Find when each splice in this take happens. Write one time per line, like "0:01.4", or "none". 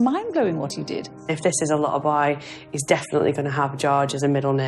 0:01.3